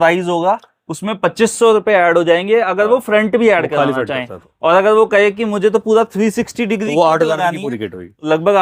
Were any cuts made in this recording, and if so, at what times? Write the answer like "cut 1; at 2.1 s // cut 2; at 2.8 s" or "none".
none